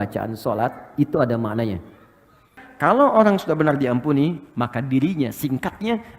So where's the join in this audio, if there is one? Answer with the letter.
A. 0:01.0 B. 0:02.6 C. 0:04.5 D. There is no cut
B